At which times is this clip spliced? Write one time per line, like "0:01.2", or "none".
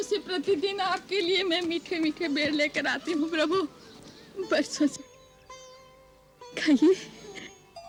none